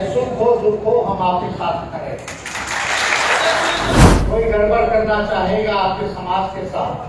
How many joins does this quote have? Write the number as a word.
one